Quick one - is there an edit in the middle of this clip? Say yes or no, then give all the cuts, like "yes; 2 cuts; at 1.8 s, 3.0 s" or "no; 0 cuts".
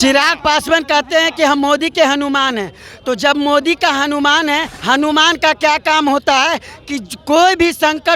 yes; 1 cut; at 4.8 s